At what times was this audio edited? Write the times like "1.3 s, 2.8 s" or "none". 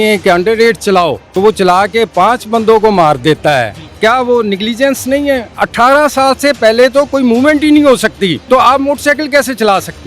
1.2 s, 3.8 s, 5.5 s, 8.4 s

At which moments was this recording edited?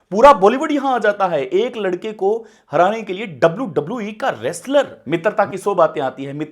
5.0 s

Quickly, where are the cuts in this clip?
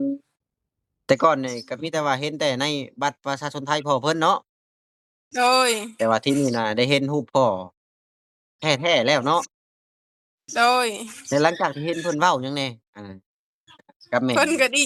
none

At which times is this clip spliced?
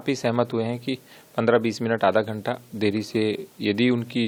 none

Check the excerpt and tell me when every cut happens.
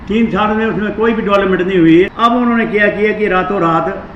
2.1 s

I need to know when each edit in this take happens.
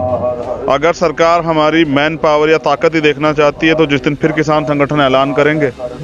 none

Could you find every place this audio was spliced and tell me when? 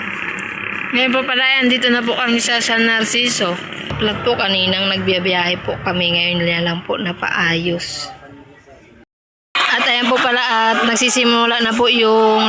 3.9 s, 9.2 s

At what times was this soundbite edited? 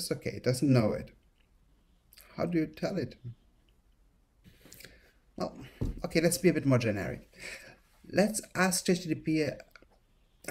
4.4 s

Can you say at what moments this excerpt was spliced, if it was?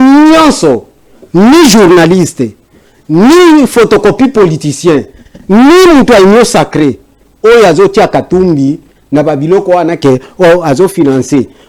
none

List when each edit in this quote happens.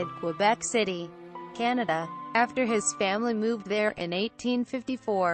4.4 s

